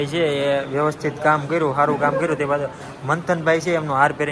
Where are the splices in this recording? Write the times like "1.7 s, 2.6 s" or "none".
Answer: none